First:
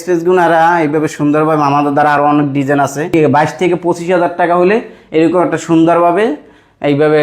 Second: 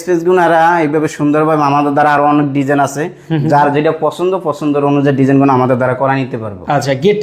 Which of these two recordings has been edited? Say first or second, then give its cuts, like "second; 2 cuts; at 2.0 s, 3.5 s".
first; 1 cut; at 3.1 s